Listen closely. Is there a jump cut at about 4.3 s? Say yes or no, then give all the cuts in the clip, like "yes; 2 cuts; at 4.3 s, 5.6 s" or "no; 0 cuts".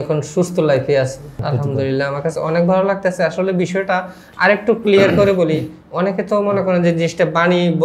no; 1 cut; at 1.4 s